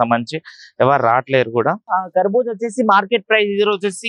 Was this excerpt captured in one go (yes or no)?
no